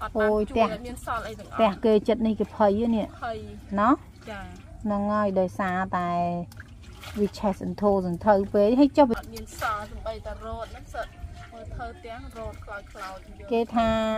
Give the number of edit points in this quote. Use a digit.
1